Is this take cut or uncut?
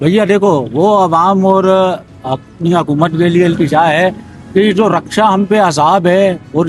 uncut